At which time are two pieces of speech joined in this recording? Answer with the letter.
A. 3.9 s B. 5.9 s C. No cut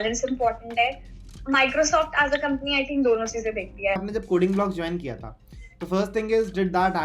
A